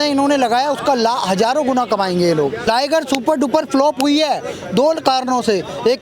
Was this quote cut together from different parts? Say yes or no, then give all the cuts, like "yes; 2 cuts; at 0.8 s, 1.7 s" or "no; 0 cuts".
yes; 1 cut; at 2.7 s